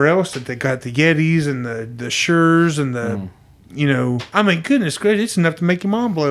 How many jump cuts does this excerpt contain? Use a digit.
1